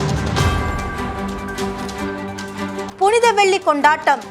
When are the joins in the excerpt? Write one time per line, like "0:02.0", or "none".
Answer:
0:02.9